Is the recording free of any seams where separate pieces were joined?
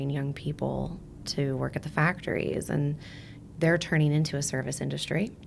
yes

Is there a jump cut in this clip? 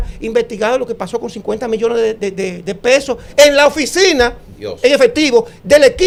no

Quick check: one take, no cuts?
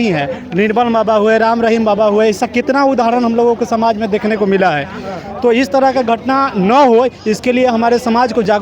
yes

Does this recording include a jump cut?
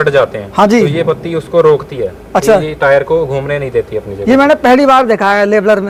no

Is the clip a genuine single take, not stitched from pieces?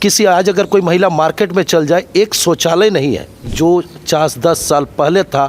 no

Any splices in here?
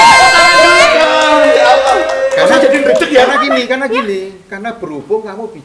no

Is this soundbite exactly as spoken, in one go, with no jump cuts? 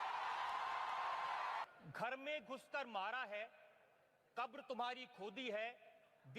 no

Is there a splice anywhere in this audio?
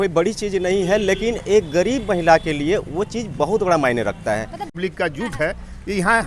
yes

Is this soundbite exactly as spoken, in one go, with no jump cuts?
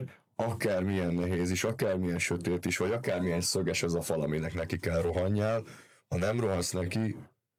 yes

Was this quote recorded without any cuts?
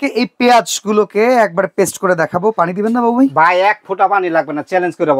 yes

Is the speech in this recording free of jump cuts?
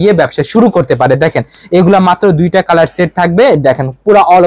yes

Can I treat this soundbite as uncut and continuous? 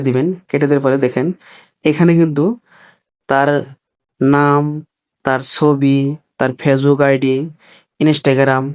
yes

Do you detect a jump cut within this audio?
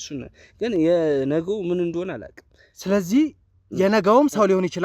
no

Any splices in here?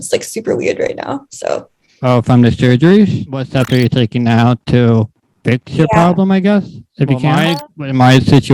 yes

